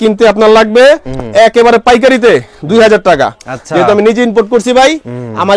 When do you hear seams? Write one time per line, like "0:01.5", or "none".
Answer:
none